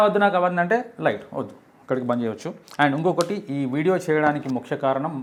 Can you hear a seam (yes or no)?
no